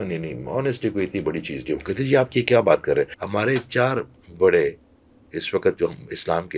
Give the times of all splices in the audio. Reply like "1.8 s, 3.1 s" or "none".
3.2 s